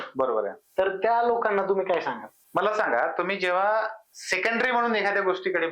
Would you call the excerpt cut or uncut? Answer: uncut